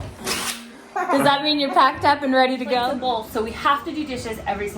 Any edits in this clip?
yes; 1 cut; at 2.9 s

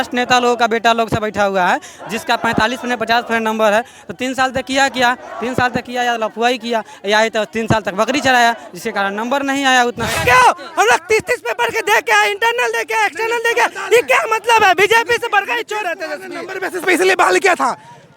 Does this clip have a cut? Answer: yes; 1 cut; at 10.2 s

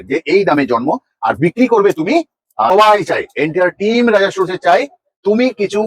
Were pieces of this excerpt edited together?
yes; 1 cut; at 2.7 s

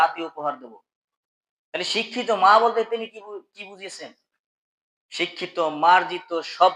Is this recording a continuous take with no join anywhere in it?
yes; 0 cuts

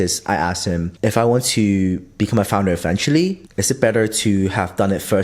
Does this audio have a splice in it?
yes; 1 cut; at 3.5 s

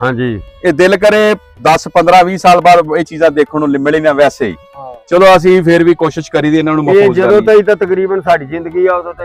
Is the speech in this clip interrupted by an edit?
no; 0 cuts

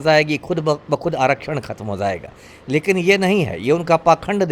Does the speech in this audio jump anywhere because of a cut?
no; 0 cuts

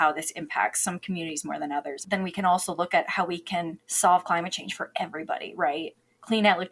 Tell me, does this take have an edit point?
yes; 2 cuts; at 2.0 s, 3.8 s

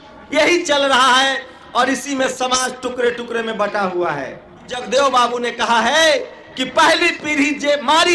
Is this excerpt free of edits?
no; 1 cut; at 4.8 s

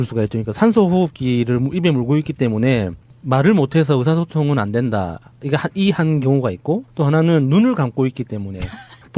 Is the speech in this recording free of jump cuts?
no; 1 cut; at 2.3 s

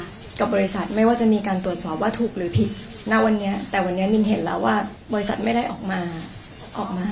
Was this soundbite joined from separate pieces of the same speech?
yes; 1 cut; at 5.0 s

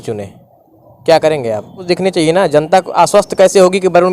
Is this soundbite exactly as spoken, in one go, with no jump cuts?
no; 1 cut; at 1.9 s

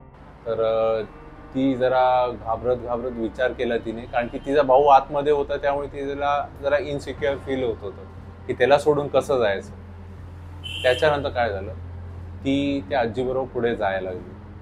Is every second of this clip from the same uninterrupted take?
yes; 0 cuts

